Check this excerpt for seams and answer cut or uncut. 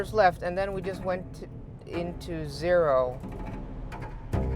uncut